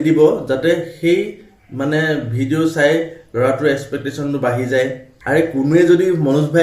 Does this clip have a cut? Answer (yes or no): yes